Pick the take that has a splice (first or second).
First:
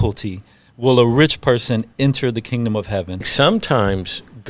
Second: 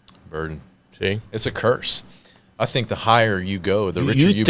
first